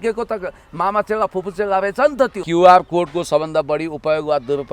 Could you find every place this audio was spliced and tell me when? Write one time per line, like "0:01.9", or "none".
0:02.4